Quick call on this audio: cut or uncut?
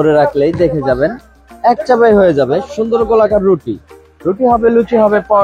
uncut